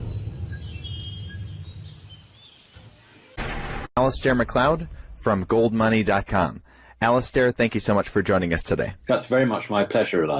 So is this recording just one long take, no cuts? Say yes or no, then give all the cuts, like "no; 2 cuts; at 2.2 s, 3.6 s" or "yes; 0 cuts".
yes; 0 cuts